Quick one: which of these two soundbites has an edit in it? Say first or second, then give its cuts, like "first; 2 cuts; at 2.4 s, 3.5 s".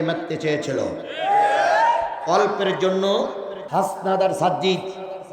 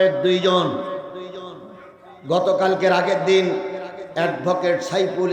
first; 1 cut; at 3.5 s